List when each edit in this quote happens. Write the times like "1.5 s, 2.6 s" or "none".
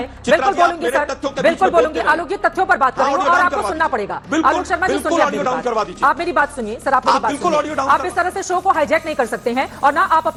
none